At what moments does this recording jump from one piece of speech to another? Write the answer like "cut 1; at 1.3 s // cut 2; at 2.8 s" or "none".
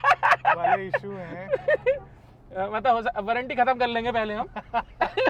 none